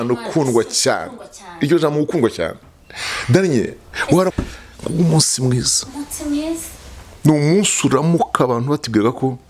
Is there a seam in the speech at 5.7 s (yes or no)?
no